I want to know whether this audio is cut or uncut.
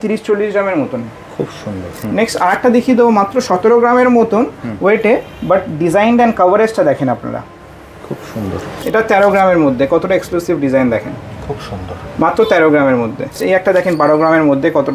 cut